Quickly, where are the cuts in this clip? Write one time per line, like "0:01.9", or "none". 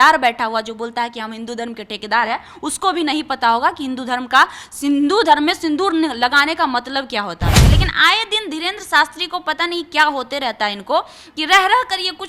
0:07.6